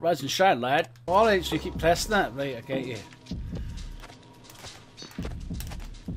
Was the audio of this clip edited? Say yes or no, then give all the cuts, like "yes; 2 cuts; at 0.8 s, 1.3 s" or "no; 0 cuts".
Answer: yes; 1 cut; at 1.0 s